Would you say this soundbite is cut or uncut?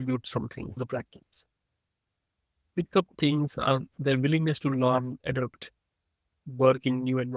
uncut